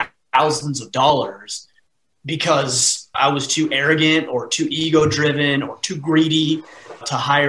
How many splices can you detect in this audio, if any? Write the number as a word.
one